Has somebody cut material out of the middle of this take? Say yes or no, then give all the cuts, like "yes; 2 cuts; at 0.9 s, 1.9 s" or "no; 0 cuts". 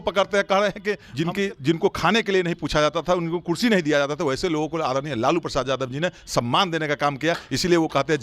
yes; 1 cut; at 1.1 s